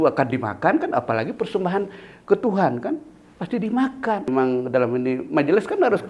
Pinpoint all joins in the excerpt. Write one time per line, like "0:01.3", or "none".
0:04.3